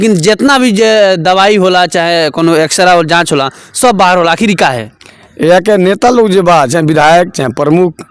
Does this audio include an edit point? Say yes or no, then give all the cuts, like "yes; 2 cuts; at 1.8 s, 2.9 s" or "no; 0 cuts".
no; 0 cuts